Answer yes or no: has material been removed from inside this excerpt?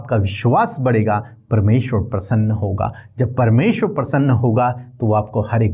no